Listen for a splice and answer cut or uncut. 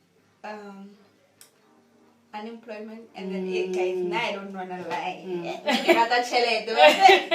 uncut